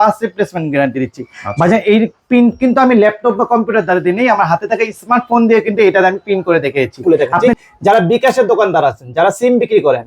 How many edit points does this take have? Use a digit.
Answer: 1